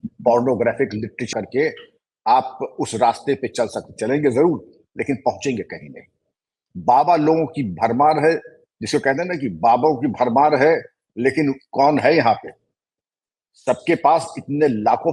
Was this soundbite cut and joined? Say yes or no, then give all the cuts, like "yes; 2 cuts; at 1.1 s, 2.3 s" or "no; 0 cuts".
yes; 1 cut; at 1.3 s